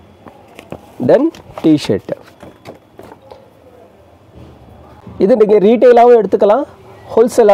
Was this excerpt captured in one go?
yes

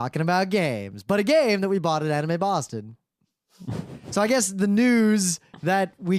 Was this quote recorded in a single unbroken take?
no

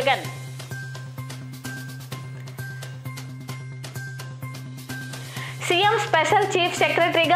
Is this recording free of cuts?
no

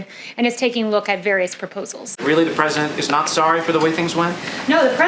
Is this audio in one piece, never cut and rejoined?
no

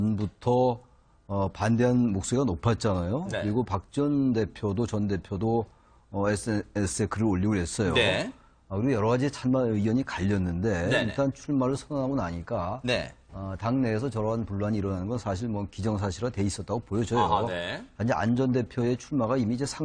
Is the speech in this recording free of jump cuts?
yes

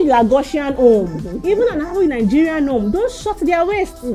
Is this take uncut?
yes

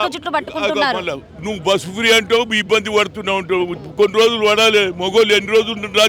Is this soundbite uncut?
yes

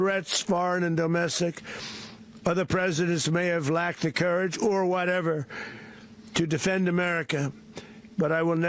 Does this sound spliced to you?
no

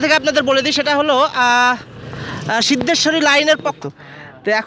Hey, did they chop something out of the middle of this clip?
yes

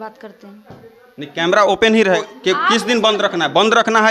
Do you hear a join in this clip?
yes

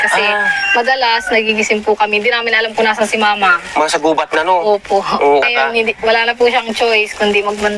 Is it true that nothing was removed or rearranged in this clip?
no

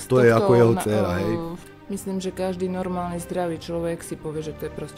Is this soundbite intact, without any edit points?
no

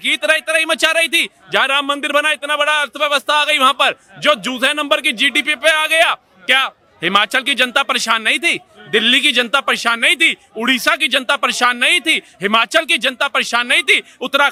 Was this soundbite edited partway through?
no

